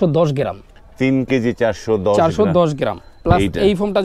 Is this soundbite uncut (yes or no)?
yes